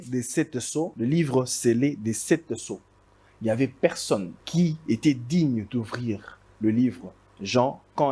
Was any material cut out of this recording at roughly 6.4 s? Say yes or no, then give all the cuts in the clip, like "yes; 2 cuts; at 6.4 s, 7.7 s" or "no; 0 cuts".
no; 2 cuts; at 0.9 s, 4.4 s